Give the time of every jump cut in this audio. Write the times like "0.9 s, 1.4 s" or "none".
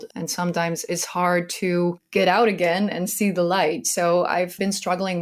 none